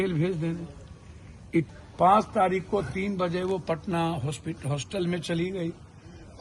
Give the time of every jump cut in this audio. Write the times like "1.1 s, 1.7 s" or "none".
1.7 s